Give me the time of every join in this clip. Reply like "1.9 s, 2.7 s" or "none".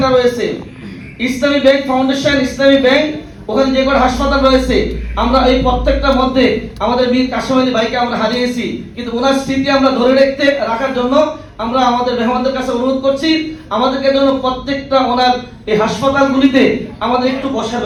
none